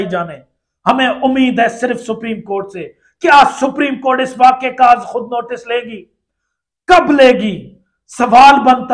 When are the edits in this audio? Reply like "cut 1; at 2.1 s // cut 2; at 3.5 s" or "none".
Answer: none